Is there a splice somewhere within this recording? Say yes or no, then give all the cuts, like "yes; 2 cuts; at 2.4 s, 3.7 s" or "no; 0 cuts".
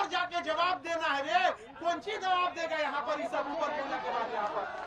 no; 0 cuts